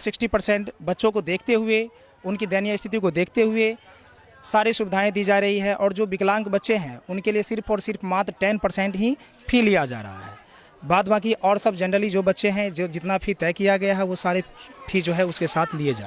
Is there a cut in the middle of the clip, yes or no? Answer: no